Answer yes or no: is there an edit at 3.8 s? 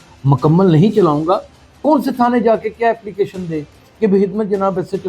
no